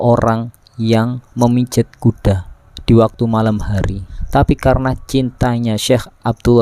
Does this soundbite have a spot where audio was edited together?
yes; 1 cut; at 4.1 s

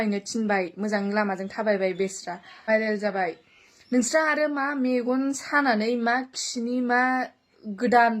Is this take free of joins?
no; 1 cut; at 2.7 s

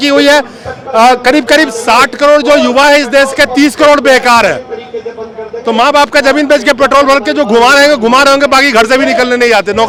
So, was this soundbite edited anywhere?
no; 0 cuts

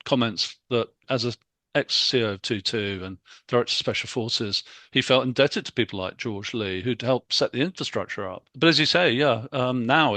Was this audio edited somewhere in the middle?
yes; 2 cuts; at 1.0 s, 8.5 s

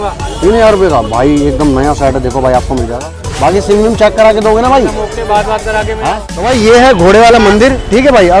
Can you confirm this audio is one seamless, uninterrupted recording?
no; 2 cuts; at 3.2 s, 6.0 s

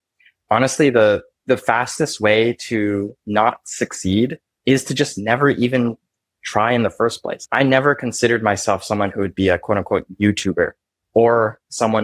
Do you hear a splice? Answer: yes; 1 cut; at 7.4 s

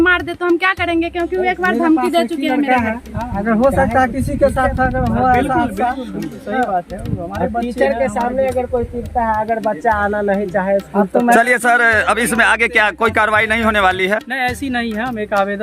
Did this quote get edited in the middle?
no; 0 cuts

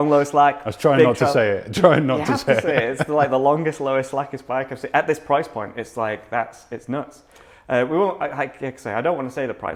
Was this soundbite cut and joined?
no; 0 cuts

